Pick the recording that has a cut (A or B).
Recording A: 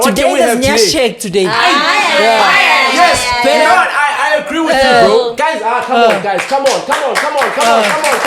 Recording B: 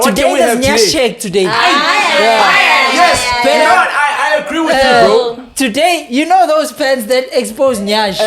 A